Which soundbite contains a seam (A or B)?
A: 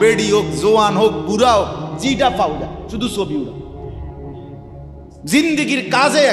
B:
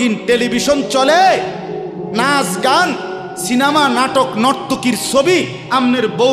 A